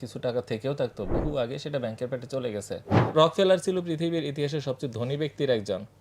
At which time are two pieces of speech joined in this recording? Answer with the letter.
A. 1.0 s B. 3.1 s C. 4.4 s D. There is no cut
B